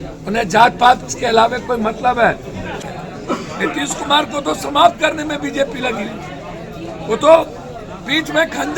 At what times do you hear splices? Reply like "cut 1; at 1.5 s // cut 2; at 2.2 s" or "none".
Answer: cut 1; at 2.8 s

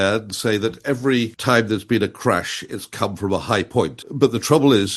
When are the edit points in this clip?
cut 1; at 1.3 s // cut 2; at 4.0 s

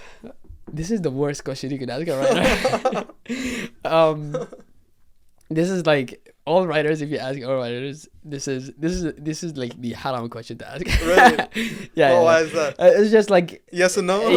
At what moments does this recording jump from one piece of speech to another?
none

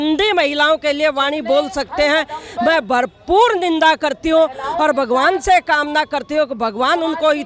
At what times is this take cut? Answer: none

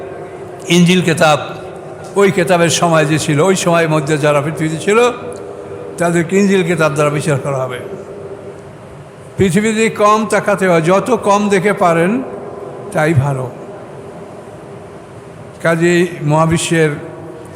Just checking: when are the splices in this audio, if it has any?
cut 1; at 8.6 s

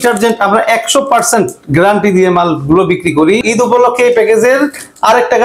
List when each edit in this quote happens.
cut 1; at 3.4 s

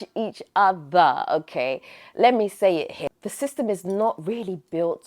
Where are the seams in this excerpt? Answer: cut 1; at 2.9 s

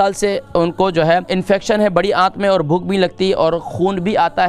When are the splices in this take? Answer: cut 1; at 1.3 s

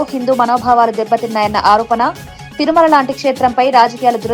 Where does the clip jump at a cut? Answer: none

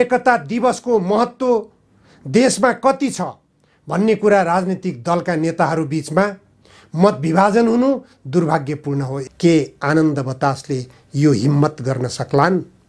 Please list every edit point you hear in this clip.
cut 1; at 9.2 s

